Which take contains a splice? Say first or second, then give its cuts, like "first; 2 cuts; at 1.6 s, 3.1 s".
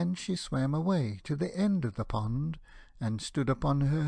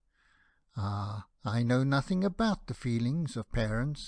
second; 1 cut; at 1.9 s